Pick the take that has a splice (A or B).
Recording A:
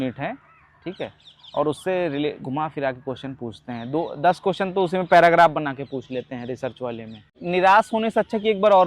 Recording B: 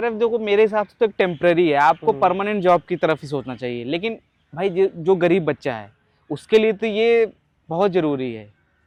A